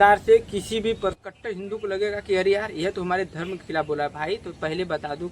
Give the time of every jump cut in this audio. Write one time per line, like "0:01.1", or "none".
0:01.2